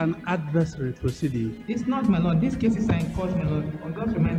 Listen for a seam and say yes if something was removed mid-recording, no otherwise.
no